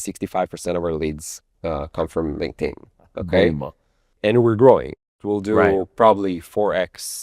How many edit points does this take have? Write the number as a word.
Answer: two